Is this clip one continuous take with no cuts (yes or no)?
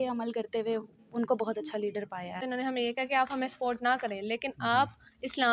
no